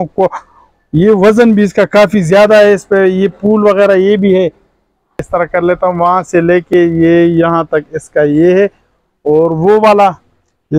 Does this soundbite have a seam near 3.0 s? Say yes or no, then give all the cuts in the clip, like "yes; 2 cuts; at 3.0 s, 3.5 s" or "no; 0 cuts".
no; 1 cut; at 5.2 s